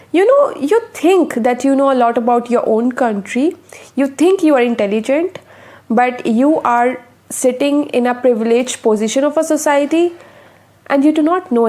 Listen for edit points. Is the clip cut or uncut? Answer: uncut